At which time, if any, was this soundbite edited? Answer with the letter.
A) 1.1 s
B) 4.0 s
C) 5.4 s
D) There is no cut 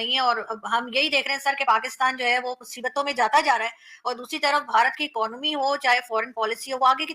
D